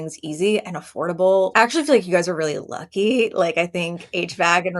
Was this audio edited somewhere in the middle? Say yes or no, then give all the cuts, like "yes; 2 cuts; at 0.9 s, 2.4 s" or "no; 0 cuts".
yes; 1 cut; at 1.5 s